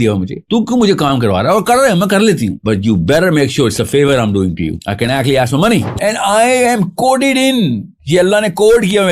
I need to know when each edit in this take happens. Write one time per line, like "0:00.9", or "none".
0:05.9